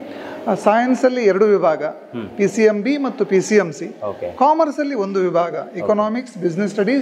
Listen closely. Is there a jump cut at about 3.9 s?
no; 0 cuts

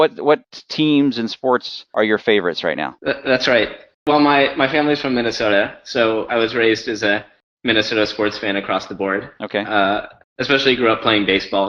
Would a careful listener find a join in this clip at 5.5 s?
no; 1 cut; at 2.4 s

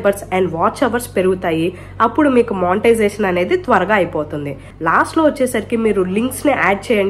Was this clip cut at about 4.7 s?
yes; 1 cut; at 4.7 s

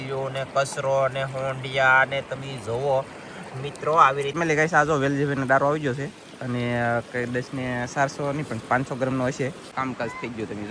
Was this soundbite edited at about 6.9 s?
no; 2 cuts; at 4.3 s, 9.6 s

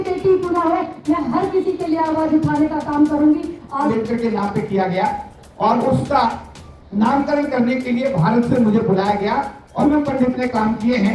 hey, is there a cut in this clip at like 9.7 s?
yes; 2 cuts; at 3.8 s, 9.7 s

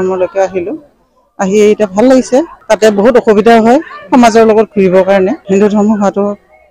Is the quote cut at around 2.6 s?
yes; 2 cuts; at 2.6 s, 5.4 s

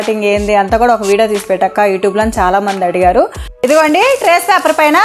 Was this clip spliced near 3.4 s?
yes; 1 cut; at 3.4 s

